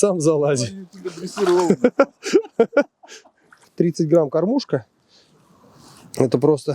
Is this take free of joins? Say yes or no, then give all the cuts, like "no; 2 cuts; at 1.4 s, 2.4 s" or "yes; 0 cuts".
no; 1 cut; at 3.6 s